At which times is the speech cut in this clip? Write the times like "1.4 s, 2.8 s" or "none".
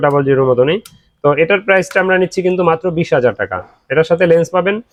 none